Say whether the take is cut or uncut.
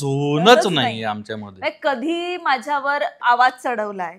uncut